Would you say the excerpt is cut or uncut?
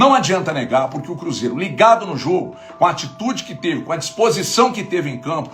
uncut